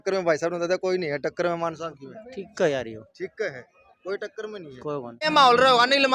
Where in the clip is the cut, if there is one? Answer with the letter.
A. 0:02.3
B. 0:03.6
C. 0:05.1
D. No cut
C